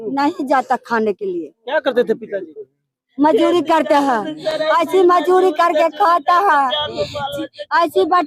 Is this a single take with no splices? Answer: yes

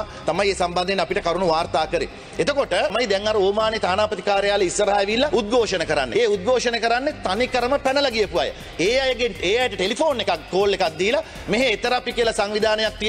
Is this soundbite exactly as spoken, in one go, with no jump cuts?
no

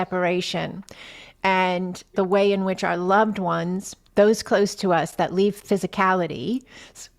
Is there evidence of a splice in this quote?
yes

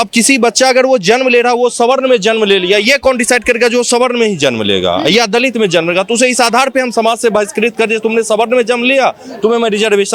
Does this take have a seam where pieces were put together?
no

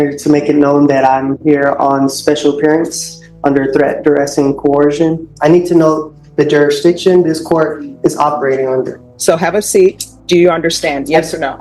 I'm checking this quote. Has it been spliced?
yes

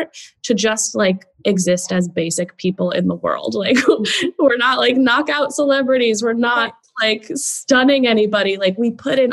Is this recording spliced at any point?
yes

